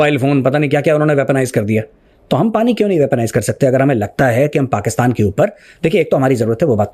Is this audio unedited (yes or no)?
yes